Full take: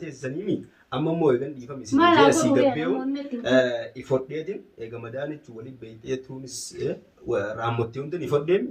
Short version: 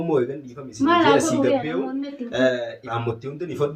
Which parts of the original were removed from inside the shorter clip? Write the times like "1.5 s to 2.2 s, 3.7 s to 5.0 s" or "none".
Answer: 4.0 s to 7.6 s